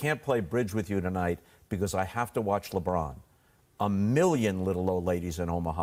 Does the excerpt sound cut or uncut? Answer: uncut